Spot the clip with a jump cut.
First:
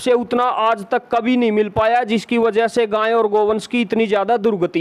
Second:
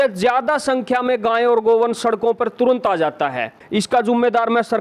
second; 1 cut; at 3.5 s

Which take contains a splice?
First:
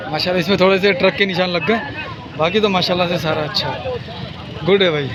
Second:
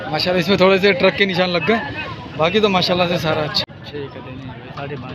second; 1 cut; at 3.6 s

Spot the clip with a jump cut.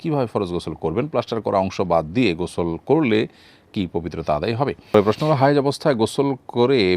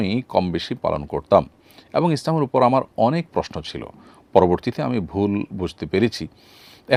first; 1 cut; at 4.9 s

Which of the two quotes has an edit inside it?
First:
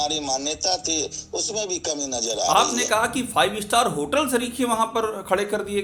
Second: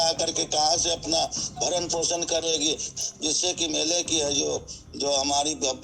second; 1 cut; at 2.9 s

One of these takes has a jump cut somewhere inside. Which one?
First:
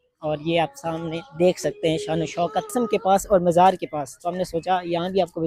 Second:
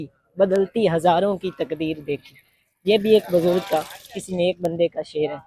first; 1 cut; at 2.7 s

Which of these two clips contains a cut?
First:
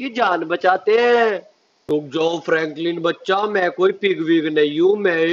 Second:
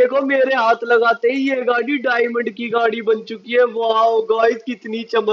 first; 1 cut; at 1.8 s

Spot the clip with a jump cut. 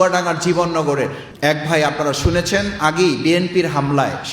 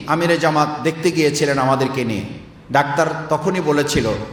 first; 1 cut; at 1.2 s

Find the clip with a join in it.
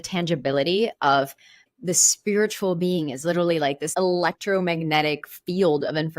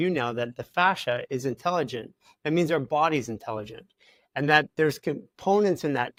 first; 2 cuts; at 1.6 s, 3.9 s

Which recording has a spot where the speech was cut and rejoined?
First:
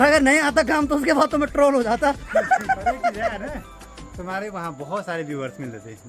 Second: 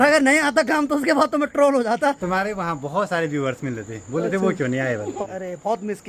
second; 2 cuts; at 2.2 s, 5.2 s

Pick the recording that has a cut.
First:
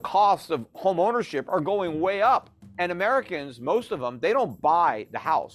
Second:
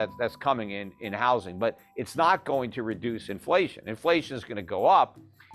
first; 1 cut; at 2.6 s

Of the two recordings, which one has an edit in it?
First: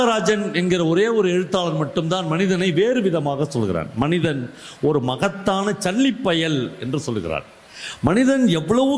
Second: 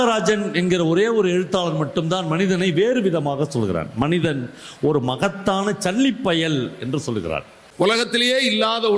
second; 1 cut; at 7.6 s

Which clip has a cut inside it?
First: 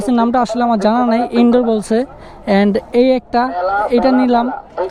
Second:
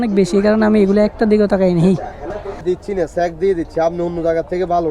second; 1 cut; at 2.6 s

